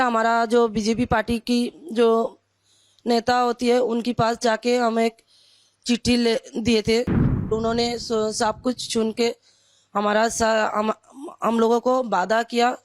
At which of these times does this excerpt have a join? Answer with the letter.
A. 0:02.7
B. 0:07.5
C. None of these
B